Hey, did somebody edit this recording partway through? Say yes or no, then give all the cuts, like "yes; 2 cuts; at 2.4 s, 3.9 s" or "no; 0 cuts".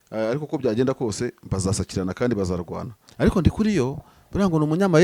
yes; 1 cut; at 3.0 s